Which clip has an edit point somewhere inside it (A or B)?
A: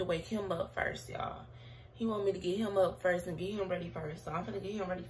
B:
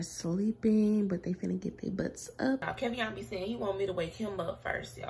B